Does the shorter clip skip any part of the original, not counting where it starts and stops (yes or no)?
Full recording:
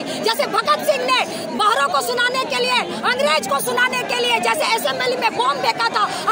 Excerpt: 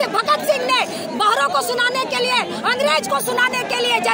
no